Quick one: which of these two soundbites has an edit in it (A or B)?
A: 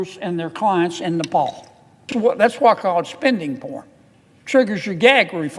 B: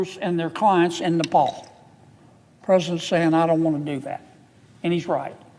A